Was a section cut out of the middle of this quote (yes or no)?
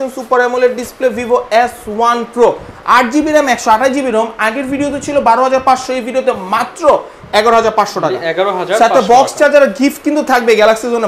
no